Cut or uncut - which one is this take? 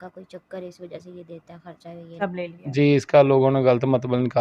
cut